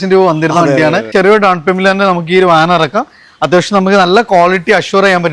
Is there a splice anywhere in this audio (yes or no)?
yes